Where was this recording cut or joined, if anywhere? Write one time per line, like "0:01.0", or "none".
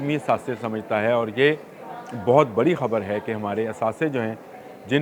none